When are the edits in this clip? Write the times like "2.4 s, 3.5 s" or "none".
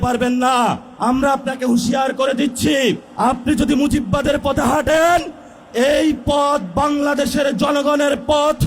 0.9 s, 3.1 s